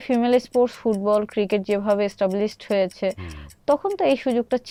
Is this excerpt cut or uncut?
uncut